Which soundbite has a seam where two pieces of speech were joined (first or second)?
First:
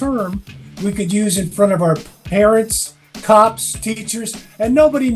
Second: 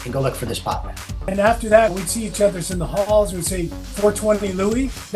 second